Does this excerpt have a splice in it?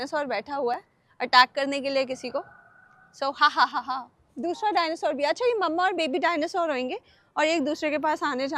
no; 0 cuts

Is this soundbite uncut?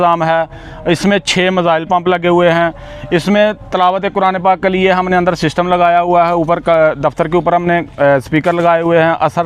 yes; 0 cuts

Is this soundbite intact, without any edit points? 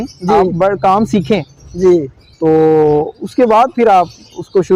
yes; 0 cuts

